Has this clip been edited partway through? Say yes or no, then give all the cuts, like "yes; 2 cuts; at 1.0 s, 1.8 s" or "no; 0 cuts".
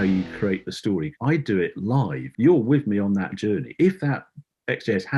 yes; 2 cuts; at 1.1 s, 2.2 s